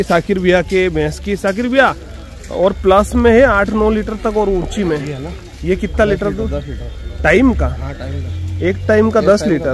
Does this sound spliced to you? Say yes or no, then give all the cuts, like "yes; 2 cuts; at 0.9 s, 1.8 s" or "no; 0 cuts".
no; 0 cuts